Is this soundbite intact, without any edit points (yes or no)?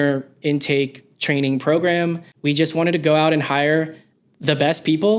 no